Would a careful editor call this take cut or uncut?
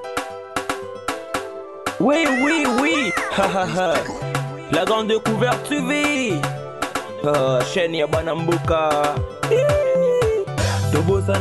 uncut